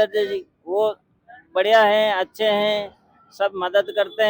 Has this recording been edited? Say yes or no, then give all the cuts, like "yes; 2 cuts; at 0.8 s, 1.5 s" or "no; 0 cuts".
no; 0 cuts